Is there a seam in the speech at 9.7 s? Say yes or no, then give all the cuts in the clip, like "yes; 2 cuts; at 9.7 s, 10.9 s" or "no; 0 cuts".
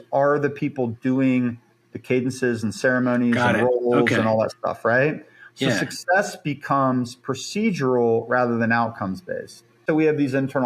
yes; 1 cut; at 9.7 s